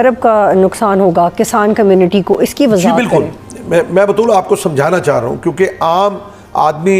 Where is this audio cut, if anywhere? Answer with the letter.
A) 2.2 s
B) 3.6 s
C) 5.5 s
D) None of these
D